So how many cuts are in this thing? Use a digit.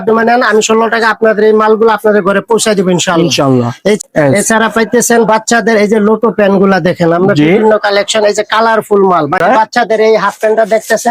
2